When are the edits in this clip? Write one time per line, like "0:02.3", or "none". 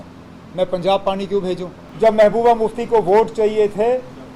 0:01.8